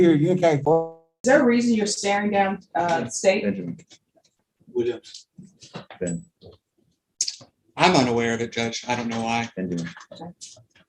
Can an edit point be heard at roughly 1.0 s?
yes; 1 cut; at 1.0 s

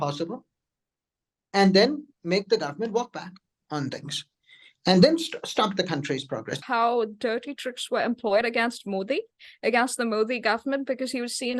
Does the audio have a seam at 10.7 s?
no; 1 cut; at 6.5 s

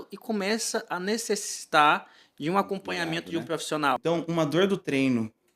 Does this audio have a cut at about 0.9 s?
no; 1 cut; at 4.0 s

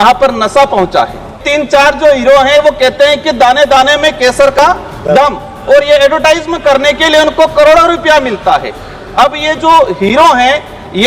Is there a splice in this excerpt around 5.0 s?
no; 1 cut; at 1.4 s

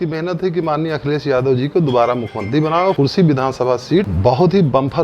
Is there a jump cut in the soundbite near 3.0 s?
yes; 2 cuts; at 3.0 s, 4.1 s

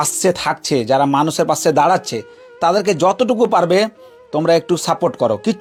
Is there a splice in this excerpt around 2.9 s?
no; 0 cuts

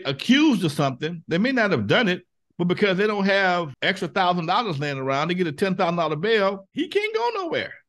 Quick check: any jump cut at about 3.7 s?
yes; 1 cut; at 3.7 s

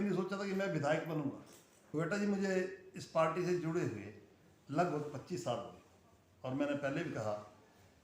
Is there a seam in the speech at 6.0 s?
no; 1 cut; at 1.9 s

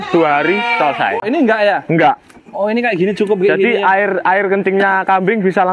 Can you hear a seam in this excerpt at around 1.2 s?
yes; 1 cut; at 1.2 s

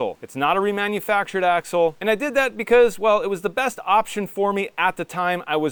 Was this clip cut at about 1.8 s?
no; 0 cuts

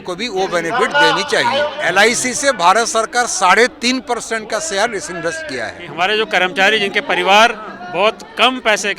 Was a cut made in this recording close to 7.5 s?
no; 2 cuts; at 1.8 s, 5.8 s

